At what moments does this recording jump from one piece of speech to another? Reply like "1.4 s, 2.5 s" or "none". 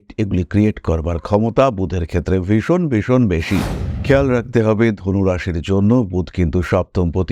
3.8 s